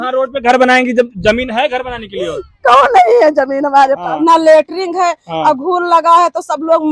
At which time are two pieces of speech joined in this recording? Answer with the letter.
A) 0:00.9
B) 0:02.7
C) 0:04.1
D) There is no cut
C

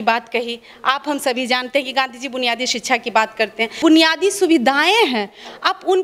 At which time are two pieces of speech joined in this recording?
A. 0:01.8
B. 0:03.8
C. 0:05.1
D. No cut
B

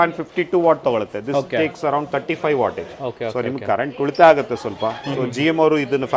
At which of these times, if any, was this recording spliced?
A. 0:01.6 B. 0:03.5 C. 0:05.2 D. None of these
D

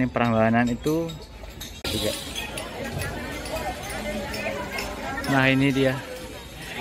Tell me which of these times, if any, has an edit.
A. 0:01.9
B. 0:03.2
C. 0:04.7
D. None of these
A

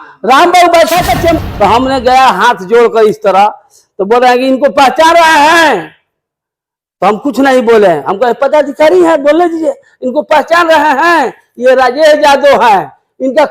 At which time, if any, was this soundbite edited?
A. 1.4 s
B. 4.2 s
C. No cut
A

